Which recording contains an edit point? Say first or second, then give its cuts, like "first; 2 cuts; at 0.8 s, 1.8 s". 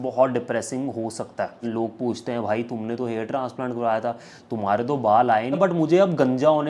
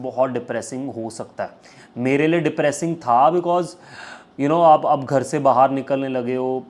first; 2 cuts; at 1.7 s, 5.6 s